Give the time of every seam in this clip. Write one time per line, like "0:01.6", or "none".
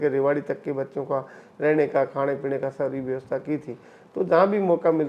none